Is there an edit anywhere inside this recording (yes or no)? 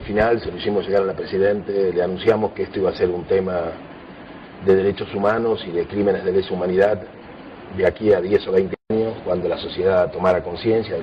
no